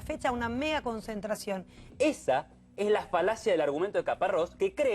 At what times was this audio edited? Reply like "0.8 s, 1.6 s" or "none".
1.9 s